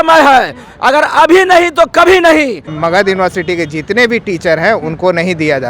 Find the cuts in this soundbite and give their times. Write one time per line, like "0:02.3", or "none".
0:02.7